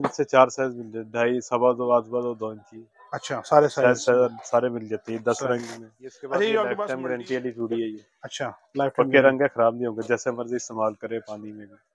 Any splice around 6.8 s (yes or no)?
yes